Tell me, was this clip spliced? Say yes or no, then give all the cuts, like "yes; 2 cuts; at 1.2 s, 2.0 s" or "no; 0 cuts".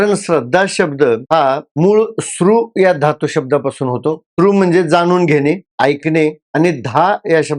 yes; 1 cut; at 6.4 s